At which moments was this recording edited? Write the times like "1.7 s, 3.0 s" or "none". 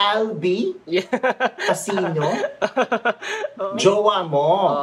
3.5 s